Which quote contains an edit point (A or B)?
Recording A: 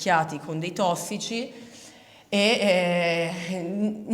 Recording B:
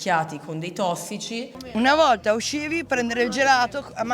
B